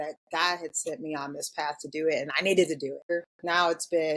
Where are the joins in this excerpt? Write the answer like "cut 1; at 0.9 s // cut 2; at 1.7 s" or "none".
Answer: cut 1; at 3.1 s